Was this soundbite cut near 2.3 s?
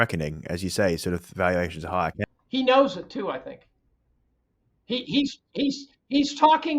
yes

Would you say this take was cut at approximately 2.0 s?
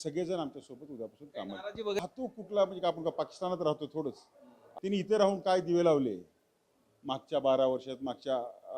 yes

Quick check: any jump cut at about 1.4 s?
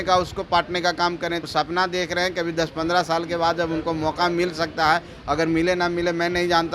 yes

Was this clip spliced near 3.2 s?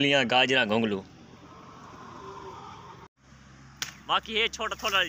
yes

